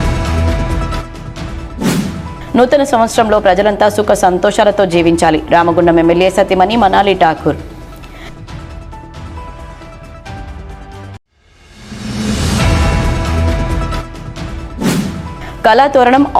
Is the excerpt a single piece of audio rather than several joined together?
yes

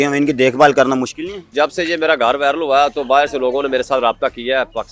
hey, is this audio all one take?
no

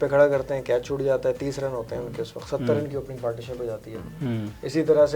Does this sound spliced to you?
no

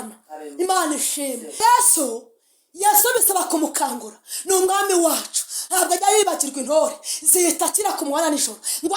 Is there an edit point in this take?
yes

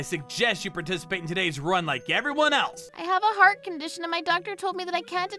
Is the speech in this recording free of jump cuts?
no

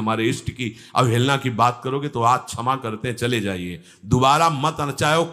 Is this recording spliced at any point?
no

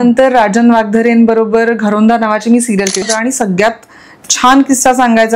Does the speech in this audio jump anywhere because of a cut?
yes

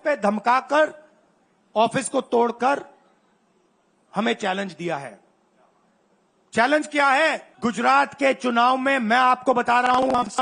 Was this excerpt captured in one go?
no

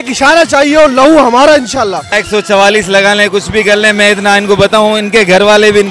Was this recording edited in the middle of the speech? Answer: yes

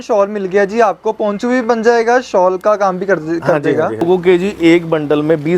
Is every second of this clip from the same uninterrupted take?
no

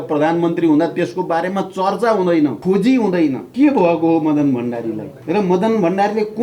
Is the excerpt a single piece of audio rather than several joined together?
no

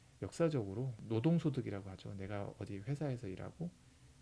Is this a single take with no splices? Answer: no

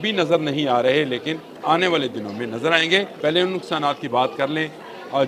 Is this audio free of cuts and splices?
no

